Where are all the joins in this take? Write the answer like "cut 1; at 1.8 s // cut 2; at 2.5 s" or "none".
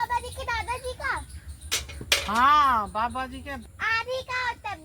cut 1; at 3.5 s